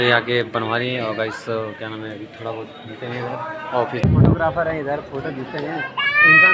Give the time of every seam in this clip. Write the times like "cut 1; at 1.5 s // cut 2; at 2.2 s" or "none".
cut 1; at 4.1 s